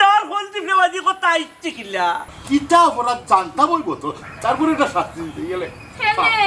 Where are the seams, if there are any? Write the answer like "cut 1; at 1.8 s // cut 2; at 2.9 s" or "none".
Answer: cut 1; at 2.2 s